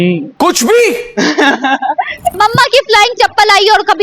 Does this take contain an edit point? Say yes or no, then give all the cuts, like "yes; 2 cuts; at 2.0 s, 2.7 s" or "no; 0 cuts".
yes; 1 cut; at 2.4 s